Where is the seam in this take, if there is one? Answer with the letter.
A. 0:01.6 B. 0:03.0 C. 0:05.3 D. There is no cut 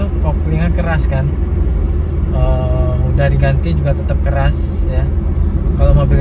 D